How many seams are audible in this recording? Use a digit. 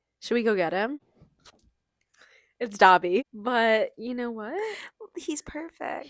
1